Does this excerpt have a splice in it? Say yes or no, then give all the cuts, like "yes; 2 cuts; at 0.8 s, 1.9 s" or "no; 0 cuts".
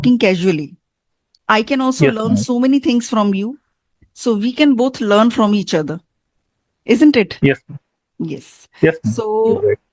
no; 0 cuts